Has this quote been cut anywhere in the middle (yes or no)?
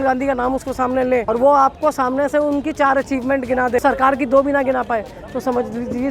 yes